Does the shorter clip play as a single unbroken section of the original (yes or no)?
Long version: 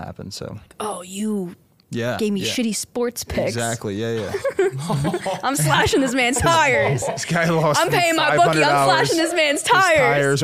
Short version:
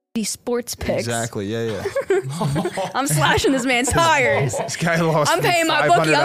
yes